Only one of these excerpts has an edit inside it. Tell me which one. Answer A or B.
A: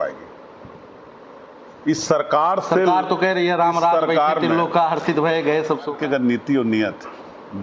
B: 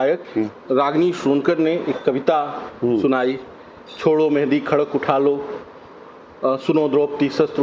A